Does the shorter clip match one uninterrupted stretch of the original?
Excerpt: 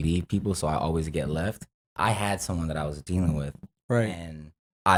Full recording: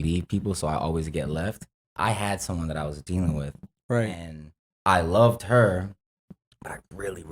yes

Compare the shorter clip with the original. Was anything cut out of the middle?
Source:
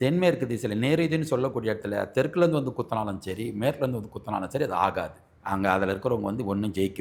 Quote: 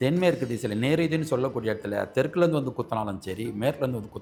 no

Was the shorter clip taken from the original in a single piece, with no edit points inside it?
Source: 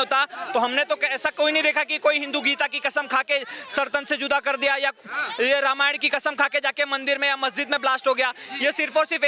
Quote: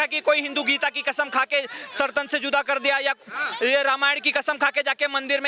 yes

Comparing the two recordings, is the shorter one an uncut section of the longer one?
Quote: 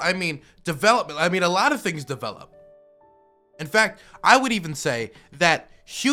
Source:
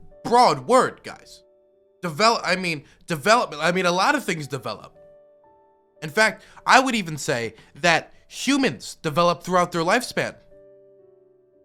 yes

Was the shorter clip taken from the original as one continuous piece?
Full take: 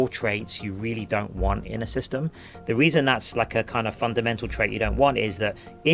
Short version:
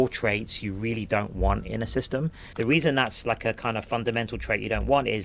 no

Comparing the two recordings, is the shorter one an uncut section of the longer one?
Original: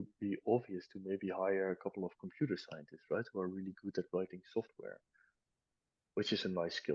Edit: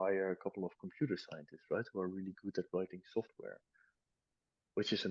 yes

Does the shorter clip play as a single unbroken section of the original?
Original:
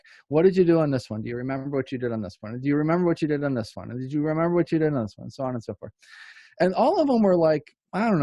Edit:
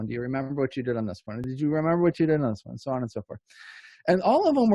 no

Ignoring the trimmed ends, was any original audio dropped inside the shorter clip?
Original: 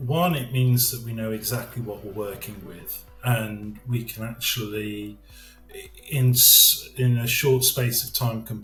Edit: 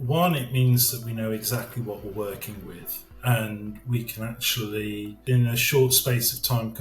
yes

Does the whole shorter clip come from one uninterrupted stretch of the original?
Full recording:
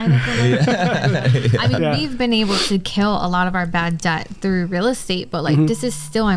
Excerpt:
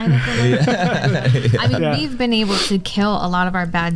yes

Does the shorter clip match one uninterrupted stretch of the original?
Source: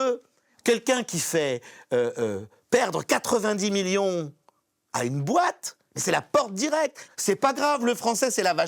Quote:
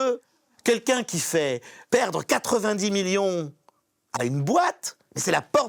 no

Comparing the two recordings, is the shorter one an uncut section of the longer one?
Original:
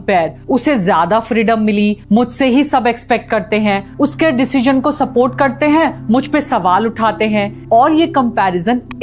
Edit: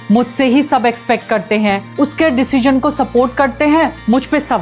yes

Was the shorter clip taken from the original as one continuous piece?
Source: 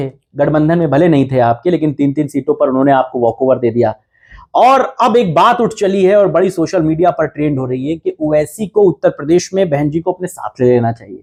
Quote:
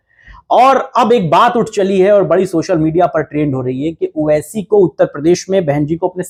yes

